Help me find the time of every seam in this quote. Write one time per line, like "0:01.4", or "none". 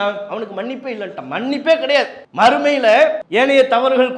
0:02.2
0:03.2

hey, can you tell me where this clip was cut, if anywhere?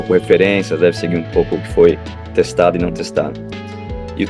none

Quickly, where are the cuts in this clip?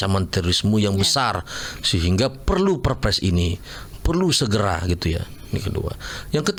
none

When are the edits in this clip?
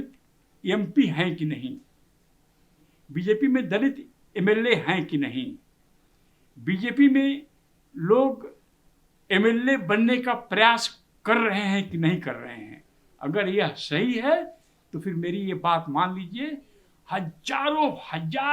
none

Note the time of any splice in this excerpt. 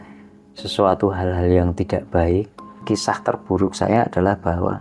0:02.8

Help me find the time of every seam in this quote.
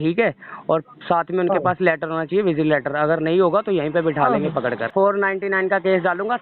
0:04.9

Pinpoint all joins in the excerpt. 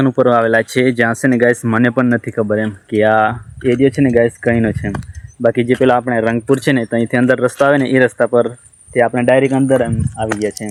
none

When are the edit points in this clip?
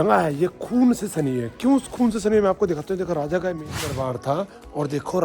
0:03.7

